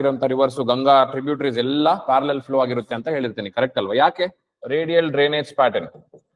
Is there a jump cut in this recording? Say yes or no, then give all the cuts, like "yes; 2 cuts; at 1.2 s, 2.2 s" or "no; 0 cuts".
yes; 1 cut; at 4.5 s